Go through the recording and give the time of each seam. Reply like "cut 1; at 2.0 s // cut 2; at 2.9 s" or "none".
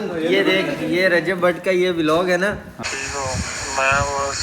cut 1; at 2.7 s